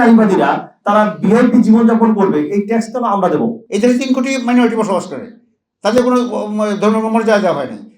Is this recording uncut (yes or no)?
no